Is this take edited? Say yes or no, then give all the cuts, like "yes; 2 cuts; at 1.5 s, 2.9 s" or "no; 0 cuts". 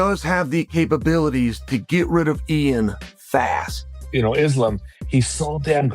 yes; 1 cut; at 4.0 s